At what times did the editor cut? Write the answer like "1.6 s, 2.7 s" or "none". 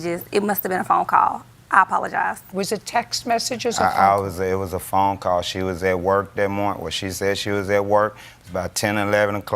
4.1 s